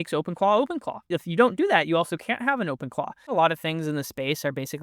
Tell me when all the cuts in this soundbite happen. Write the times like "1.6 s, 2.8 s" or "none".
1.0 s, 3.2 s